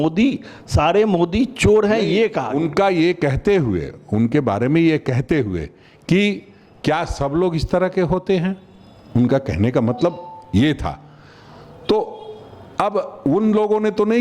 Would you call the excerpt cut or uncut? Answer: uncut